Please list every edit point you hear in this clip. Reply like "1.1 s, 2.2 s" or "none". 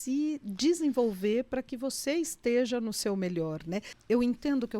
3.9 s